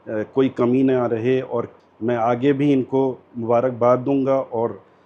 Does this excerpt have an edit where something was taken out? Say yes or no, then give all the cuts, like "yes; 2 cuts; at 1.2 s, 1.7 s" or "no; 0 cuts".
yes; 1 cut; at 1.8 s